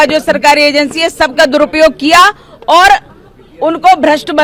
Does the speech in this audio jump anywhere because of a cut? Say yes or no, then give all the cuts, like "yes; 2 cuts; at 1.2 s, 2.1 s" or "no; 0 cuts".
no; 0 cuts